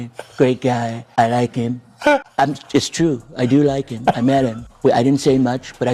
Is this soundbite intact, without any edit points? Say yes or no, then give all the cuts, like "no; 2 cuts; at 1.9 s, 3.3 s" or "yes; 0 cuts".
no; 3 cuts; at 1.0 s, 2.3 s, 4.6 s